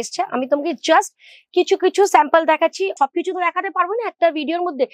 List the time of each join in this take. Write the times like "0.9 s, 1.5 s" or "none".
2.9 s